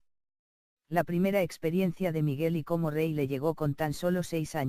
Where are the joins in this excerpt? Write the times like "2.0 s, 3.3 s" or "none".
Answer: 1.6 s